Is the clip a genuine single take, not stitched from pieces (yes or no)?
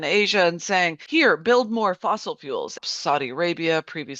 no